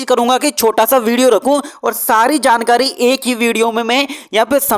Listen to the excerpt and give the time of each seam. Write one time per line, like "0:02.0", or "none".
none